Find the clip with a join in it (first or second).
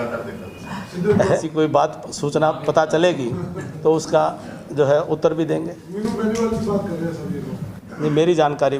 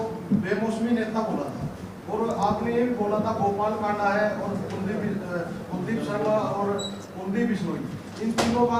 first